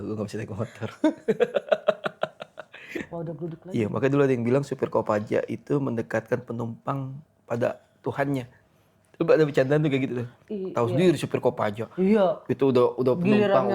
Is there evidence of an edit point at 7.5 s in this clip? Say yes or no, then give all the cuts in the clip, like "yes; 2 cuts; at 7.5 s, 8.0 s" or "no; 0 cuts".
no; 1 cut; at 3.1 s